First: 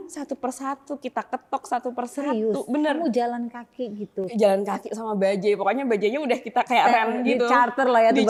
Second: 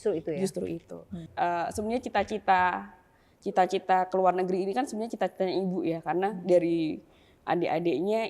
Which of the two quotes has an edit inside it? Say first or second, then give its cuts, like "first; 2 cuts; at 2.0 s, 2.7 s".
second; 1 cut; at 1.2 s